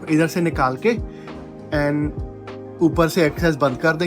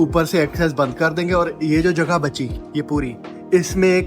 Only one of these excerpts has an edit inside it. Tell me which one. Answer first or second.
second